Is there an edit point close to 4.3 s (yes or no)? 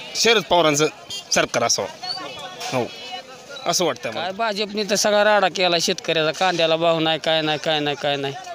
yes